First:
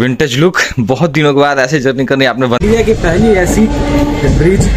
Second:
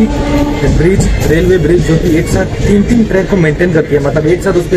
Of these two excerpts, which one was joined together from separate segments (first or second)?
first